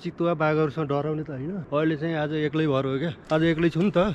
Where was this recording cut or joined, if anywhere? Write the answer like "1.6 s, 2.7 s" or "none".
1.6 s, 3.2 s